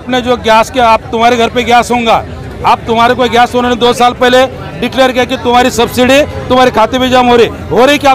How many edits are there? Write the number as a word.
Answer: one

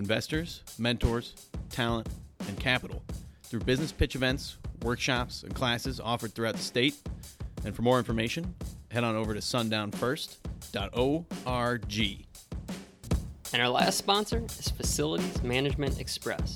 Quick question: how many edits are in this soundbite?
one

